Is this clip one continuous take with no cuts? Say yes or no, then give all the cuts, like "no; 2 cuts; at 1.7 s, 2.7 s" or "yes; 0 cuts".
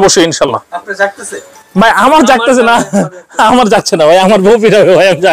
yes; 0 cuts